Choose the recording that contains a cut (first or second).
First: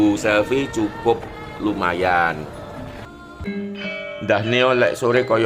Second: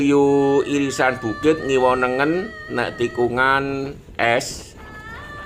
first